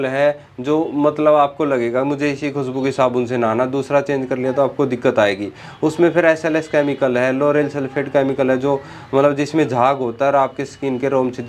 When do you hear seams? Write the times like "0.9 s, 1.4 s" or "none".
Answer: none